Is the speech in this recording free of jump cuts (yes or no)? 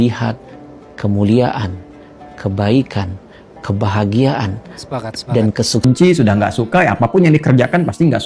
no